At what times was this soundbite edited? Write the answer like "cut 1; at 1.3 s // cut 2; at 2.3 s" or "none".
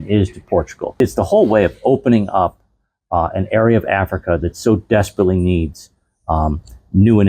cut 1; at 1.0 s